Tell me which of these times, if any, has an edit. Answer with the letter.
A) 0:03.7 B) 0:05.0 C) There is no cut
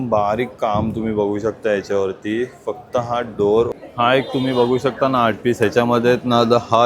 A